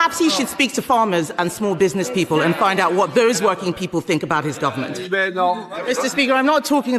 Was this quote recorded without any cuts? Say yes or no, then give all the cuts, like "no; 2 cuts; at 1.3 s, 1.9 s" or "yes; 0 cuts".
no; 1 cut; at 5.1 s